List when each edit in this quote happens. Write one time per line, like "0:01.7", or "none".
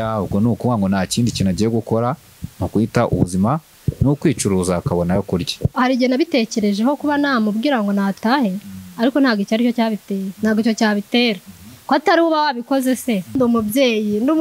0:05.7
0:13.3